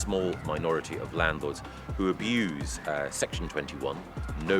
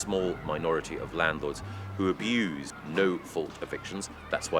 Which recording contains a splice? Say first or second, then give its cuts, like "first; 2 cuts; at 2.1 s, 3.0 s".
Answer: second; 1 cut; at 2.7 s